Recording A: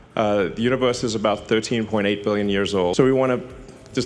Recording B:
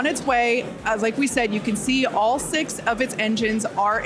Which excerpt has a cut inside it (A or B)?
A